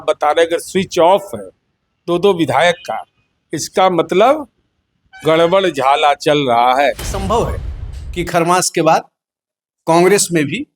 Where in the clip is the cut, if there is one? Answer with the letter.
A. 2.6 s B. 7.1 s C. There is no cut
B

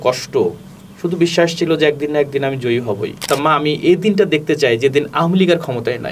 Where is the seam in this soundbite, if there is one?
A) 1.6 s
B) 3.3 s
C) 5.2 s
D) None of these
B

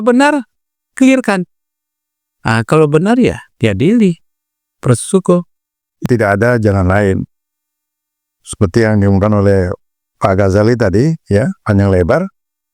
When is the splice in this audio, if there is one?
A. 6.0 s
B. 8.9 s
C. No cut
A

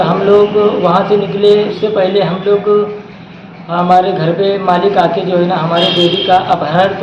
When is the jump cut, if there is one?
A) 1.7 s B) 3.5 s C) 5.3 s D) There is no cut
A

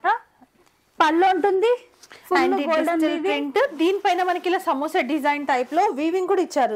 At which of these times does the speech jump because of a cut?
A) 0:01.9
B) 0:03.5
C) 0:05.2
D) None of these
D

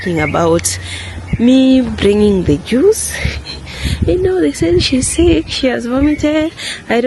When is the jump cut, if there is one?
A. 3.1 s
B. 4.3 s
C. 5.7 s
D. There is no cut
D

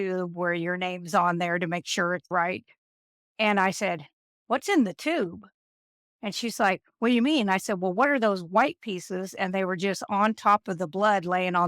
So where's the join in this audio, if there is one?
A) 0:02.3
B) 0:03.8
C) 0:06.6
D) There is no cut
A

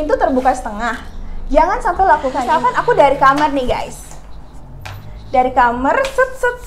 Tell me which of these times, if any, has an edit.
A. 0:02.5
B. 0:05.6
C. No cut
A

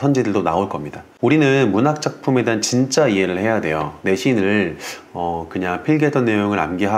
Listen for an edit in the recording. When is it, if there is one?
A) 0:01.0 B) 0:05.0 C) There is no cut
A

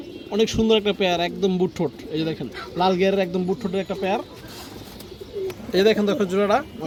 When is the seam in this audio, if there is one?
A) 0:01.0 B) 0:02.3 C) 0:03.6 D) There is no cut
D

